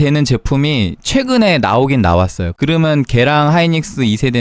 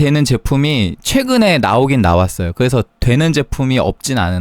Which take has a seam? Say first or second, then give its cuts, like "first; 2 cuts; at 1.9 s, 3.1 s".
first; 1 cut; at 2.5 s